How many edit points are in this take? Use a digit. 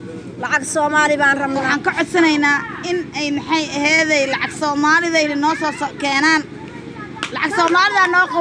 1